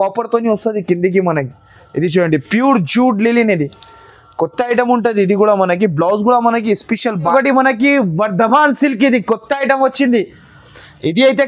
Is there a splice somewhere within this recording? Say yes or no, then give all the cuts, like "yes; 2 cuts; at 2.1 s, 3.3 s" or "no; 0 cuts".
yes; 1 cut; at 7.1 s